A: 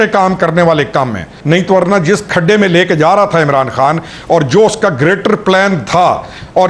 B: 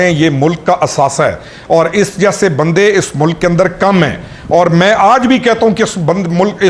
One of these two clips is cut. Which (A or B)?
A